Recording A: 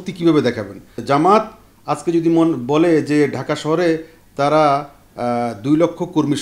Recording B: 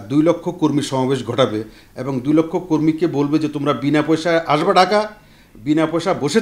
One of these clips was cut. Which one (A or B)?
A